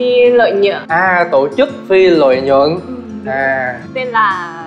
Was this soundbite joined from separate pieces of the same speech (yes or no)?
yes